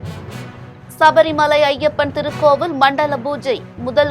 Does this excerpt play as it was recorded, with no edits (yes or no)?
no